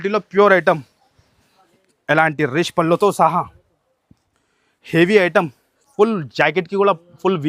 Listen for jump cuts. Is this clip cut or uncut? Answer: uncut